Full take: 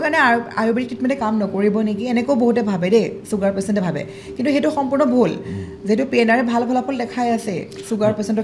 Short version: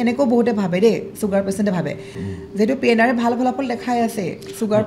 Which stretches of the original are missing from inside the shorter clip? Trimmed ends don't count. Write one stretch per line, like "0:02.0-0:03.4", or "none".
0:04.3-0:05.5

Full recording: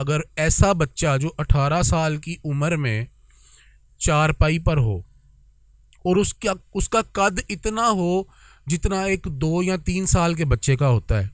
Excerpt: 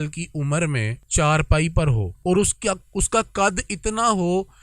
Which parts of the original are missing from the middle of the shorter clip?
0:03.1-0:03.9
0:05.0-0:05.9

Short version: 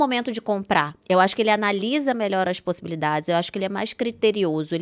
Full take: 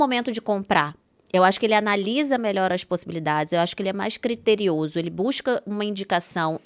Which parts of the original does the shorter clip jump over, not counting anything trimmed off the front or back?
0:01.0-0:01.2

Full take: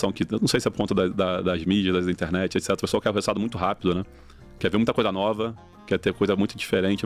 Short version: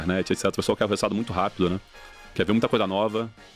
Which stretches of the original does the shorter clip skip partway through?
none

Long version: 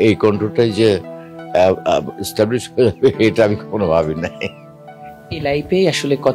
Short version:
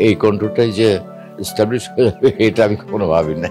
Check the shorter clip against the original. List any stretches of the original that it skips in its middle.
0:01.4-0:02.2

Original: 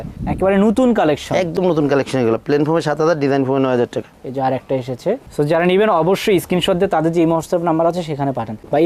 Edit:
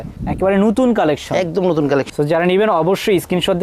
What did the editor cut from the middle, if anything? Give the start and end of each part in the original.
0:02.1-0:05.3

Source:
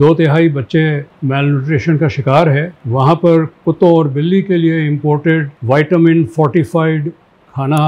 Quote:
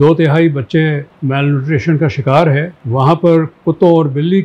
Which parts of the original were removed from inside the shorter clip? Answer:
none

